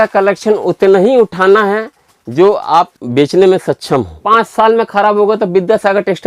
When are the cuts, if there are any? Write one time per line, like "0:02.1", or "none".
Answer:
0:03.0
0:04.2